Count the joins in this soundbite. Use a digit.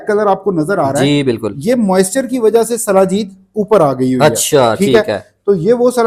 0